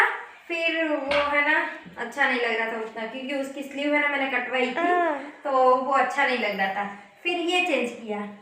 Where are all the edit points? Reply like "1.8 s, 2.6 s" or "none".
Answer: none